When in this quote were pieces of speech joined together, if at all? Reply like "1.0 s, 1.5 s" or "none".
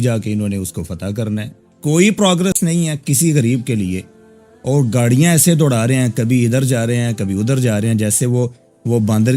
1.7 s